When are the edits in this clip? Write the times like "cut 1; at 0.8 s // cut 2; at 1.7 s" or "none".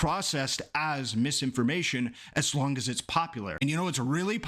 cut 1; at 3.5 s

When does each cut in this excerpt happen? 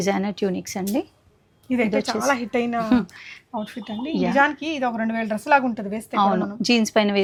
none

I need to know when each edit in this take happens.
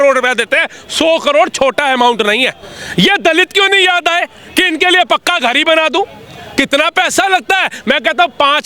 none

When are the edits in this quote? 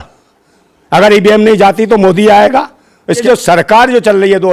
cut 1; at 3.1 s

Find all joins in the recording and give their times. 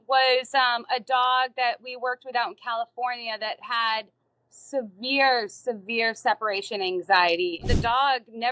cut 1; at 7.6 s

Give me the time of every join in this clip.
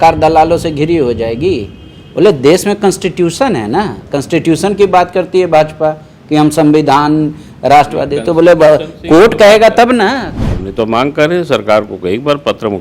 cut 1; at 10.3 s

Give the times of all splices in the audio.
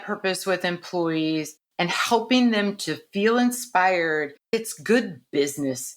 cut 1; at 4.5 s

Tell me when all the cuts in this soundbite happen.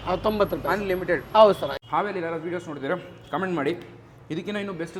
cut 1; at 1.7 s

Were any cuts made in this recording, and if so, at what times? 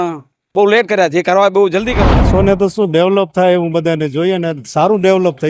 cut 1; at 1.9 s

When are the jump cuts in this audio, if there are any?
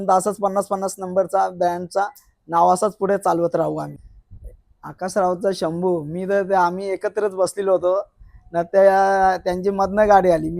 cut 1; at 4.0 s

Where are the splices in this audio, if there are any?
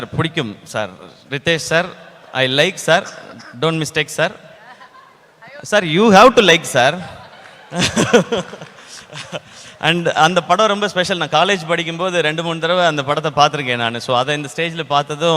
none

